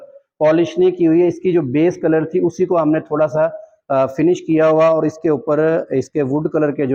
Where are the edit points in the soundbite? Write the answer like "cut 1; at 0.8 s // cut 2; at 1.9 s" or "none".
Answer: none